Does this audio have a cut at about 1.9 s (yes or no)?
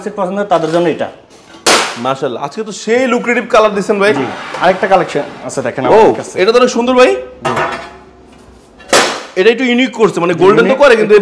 no